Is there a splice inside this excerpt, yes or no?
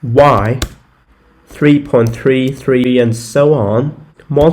yes